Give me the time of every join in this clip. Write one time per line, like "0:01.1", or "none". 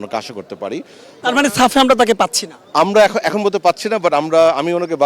none